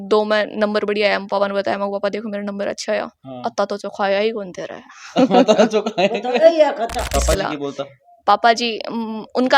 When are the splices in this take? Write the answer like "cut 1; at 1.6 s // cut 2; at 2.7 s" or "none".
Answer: cut 1; at 7.0 s